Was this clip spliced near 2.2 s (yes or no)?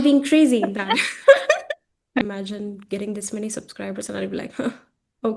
yes